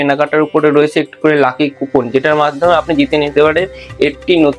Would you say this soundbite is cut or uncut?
uncut